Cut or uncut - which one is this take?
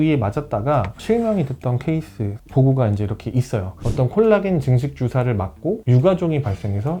cut